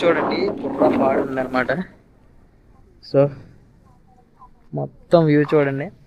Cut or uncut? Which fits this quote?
uncut